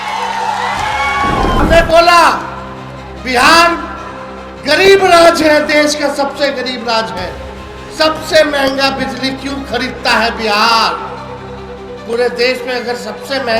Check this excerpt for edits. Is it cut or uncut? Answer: cut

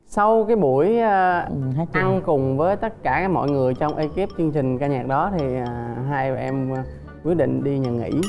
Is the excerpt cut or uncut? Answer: uncut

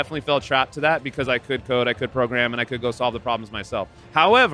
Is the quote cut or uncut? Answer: uncut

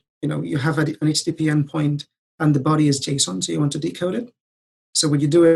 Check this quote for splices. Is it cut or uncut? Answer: uncut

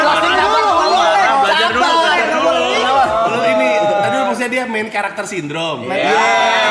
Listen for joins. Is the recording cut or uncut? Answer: uncut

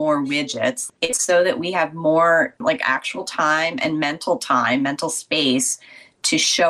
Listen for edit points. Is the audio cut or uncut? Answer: cut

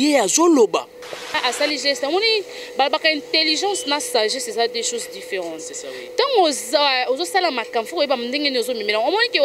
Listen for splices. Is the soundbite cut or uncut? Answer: cut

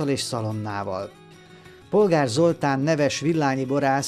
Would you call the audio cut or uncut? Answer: cut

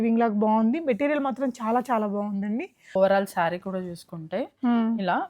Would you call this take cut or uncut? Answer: cut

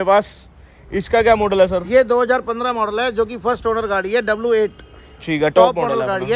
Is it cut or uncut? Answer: uncut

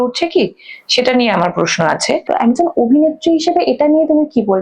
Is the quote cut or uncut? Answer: cut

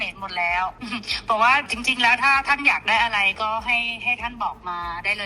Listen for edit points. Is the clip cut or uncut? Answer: cut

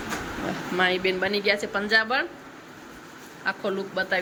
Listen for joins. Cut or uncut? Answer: uncut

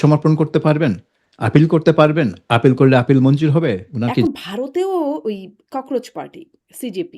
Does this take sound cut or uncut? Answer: cut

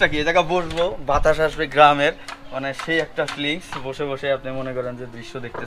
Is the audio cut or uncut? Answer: uncut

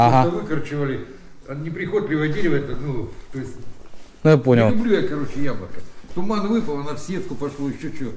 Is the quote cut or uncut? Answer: uncut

